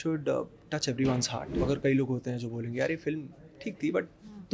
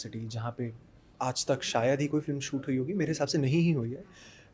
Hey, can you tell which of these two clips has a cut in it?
first; 1 cut; at 1.6 s

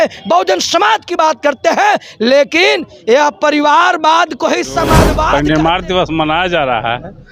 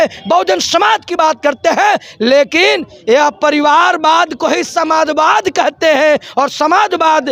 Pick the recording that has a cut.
first; 1 cut; at 5.3 s

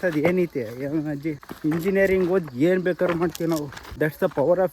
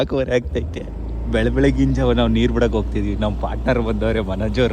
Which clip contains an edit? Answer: first; 2 cuts; at 1.5 s, 3.8 s

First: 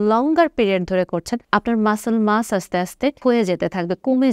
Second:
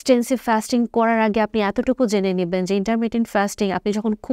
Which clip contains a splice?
first; 2 cuts; at 1.4 s, 3.2 s

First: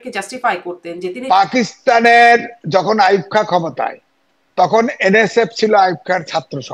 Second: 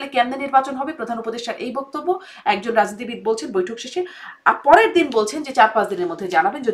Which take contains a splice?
first; 1 cut; at 1.2 s

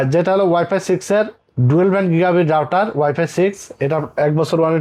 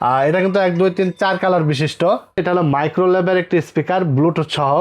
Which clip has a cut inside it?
second; 1 cut; at 2.5 s

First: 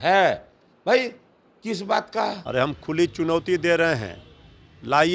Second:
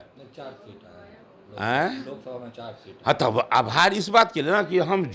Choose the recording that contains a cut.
first; 1 cut; at 2.4 s

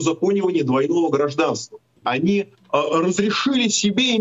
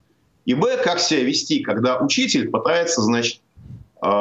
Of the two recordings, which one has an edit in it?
first; 1 cut; at 2.0 s

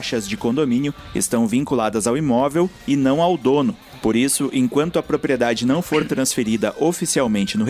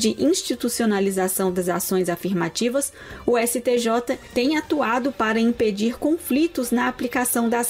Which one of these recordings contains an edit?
first; 1 cut; at 1.0 s

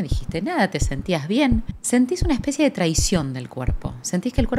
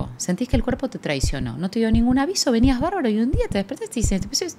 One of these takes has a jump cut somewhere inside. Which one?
first; 1 cut; at 1.7 s

